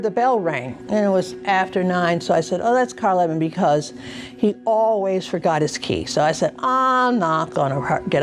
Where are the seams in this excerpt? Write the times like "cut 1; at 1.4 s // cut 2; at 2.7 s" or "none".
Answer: none